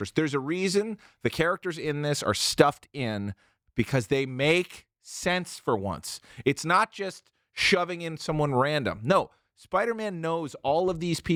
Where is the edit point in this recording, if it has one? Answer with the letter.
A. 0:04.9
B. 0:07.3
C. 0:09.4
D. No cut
D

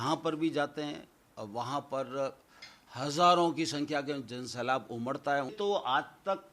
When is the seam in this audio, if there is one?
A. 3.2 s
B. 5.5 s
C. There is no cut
B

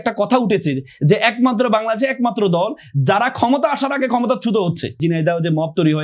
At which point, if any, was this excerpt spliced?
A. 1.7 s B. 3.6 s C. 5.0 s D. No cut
C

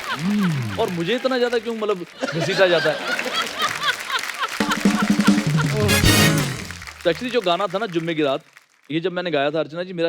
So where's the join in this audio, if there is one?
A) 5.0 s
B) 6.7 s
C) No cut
C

